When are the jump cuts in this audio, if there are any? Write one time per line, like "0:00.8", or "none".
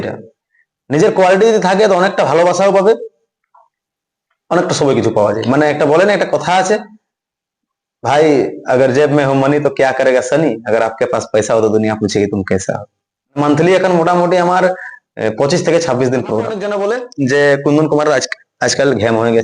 0:05.4
0:13.4
0:16.7